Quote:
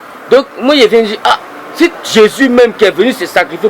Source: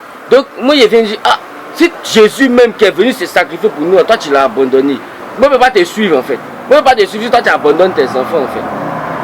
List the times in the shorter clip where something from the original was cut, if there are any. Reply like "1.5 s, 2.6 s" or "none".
none